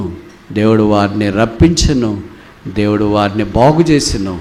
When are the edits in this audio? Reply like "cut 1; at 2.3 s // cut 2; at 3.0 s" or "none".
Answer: none